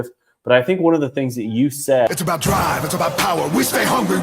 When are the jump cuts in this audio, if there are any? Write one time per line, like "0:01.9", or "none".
0:02.1